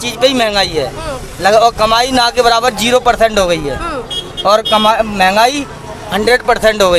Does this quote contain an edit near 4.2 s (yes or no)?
no